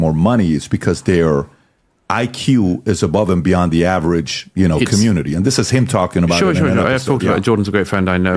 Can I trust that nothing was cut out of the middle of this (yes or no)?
yes